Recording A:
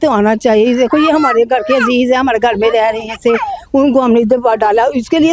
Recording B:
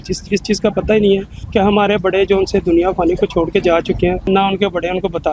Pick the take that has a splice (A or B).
B